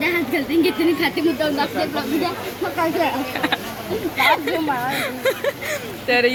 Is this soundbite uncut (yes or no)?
yes